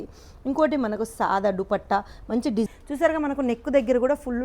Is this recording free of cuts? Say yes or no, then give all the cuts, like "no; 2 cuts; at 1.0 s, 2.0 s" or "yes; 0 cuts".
no; 1 cut; at 2.7 s